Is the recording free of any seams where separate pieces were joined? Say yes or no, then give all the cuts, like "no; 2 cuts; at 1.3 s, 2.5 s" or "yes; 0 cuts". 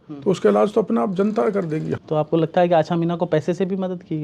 no; 1 cut; at 2.0 s